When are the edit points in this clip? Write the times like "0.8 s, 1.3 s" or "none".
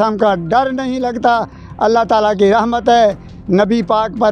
none